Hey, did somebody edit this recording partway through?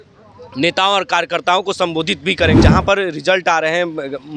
yes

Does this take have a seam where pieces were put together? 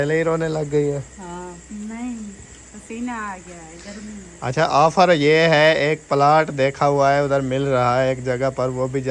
no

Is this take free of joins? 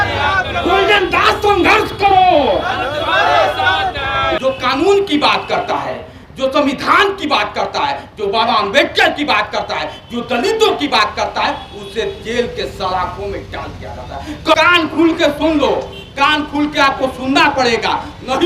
no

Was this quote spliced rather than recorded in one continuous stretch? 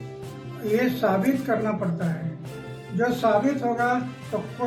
no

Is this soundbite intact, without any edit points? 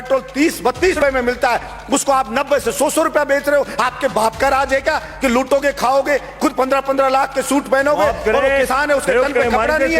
no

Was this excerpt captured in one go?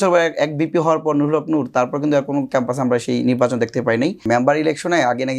no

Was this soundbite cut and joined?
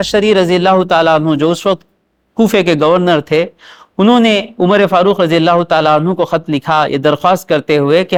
no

